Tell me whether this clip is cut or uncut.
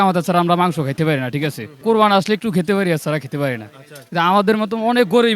cut